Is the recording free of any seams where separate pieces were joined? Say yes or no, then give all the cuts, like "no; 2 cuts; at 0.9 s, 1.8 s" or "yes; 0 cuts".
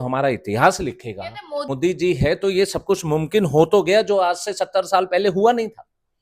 no; 1 cut; at 1.7 s